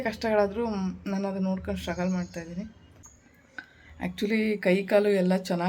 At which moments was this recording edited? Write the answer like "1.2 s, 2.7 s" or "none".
3.2 s